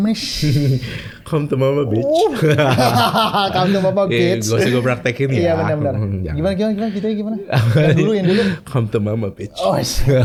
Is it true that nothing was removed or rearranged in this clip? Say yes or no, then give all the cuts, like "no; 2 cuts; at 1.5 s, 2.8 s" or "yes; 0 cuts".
yes; 0 cuts